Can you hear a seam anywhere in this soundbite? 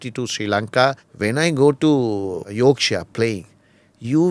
yes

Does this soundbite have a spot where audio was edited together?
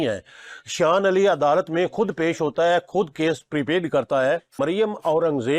yes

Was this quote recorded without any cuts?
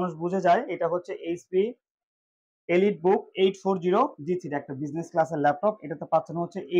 yes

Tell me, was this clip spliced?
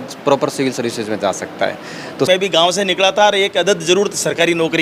yes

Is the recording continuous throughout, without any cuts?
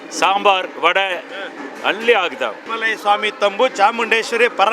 no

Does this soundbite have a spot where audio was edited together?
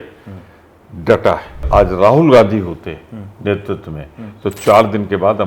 yes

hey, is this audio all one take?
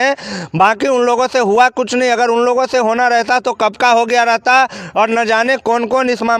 yes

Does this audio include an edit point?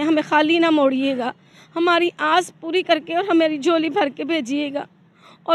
no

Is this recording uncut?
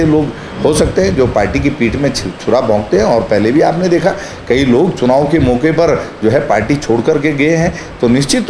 yes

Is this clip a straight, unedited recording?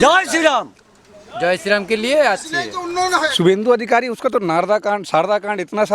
no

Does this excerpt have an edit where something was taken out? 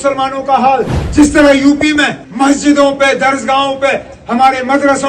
yes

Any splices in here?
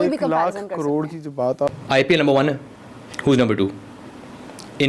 yes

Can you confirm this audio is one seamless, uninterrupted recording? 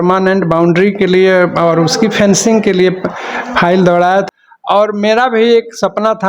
no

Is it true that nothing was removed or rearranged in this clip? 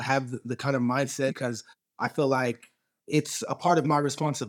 no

